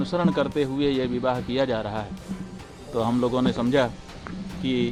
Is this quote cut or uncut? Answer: uncut